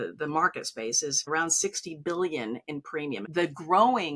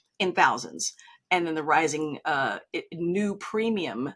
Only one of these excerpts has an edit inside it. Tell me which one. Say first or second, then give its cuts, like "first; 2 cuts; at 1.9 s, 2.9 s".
first; 2 cuts; at 1.3 s, 3.2 s